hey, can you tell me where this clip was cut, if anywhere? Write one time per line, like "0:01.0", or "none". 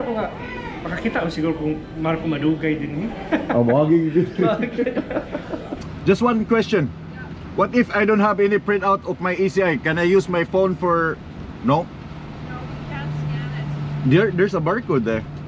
0:05.8